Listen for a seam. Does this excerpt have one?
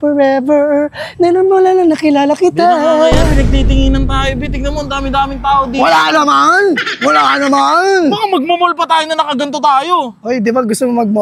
no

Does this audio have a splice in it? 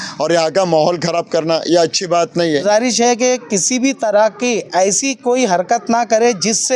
yes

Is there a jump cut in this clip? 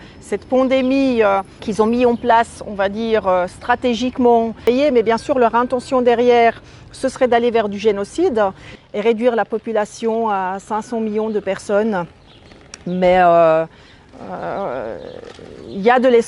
yes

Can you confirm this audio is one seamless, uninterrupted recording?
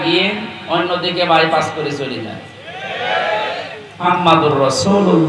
no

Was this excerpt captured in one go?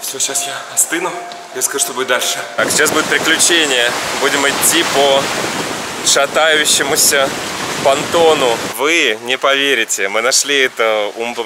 no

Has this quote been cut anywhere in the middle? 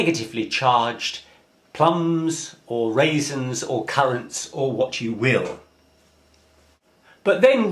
yes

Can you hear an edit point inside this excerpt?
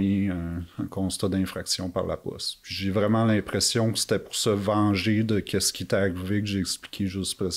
no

